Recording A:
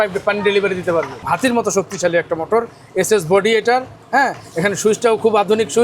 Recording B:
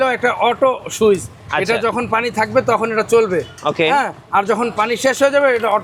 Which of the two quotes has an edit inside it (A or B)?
A